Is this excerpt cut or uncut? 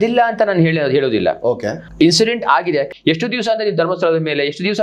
cut